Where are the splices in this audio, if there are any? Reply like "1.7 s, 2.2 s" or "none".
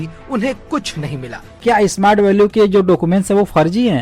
1.6 s